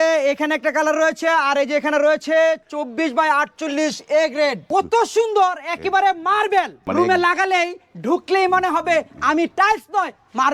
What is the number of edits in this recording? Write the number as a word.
two